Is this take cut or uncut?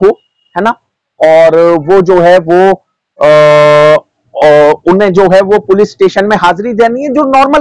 uncut